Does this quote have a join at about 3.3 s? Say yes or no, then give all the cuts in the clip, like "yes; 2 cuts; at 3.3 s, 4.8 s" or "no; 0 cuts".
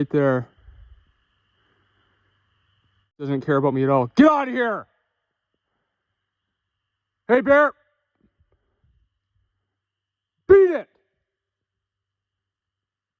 yes; 1 cut; at 3.3 s